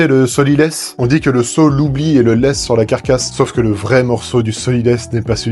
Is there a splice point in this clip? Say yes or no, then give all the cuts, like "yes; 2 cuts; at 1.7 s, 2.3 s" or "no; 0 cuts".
yes; 2 cuts; at 0.9 s, 3.3 s